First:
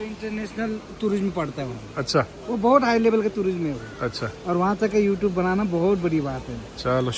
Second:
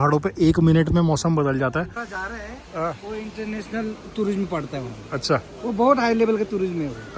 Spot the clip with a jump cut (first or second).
second